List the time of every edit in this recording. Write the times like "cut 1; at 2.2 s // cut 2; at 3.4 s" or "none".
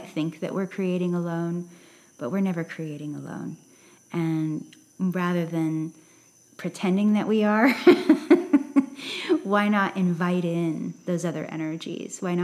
none